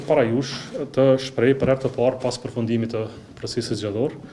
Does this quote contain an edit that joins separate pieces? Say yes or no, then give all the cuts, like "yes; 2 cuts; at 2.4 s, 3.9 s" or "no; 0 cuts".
no; 0 cuts